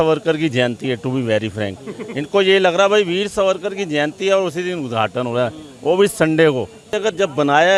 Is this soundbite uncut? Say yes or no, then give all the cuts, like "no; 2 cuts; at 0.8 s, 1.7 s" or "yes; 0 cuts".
yes; 0 cuts